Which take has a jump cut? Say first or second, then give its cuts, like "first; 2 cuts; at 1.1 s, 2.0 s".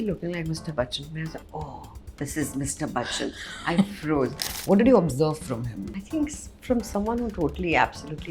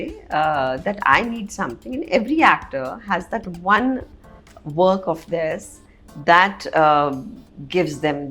first; 2 cuts; at 4.4 s, 6.0 s